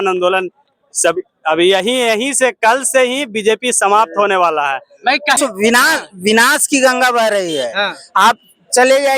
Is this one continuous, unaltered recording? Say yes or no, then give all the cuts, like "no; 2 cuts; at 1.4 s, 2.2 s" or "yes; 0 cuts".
no; 1 cut; at 5.4 s